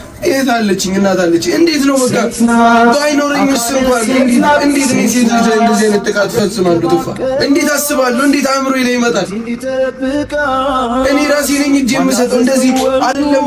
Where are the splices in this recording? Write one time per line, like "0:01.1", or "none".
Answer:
none

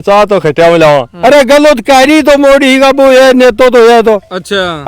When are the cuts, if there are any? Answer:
0:01.1

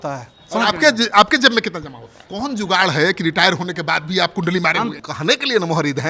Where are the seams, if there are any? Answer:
0:02.2
0:05.0

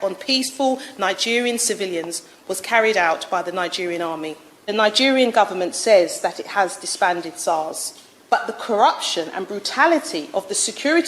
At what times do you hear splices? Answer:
0:04.7

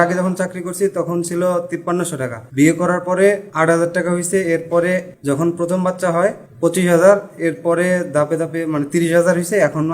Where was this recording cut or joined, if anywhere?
0:02.0
0:03.5
0:05.1
0:06.5

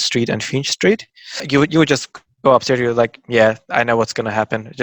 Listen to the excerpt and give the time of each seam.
0:01.4

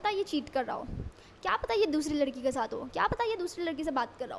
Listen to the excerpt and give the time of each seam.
none

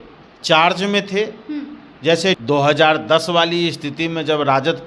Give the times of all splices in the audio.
0:02.4

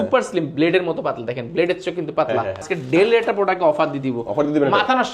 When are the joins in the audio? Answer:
0:02.7

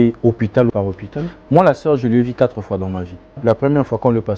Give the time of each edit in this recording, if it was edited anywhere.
0:00.8
0:03.3

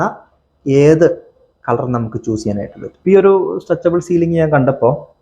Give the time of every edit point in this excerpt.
0:02.8

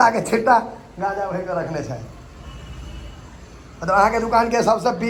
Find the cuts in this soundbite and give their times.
none

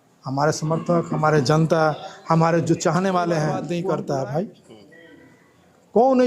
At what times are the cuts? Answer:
0:03.6

